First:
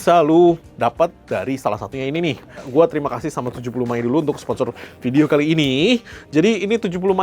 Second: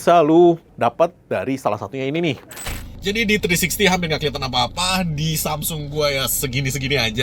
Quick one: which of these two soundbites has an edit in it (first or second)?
second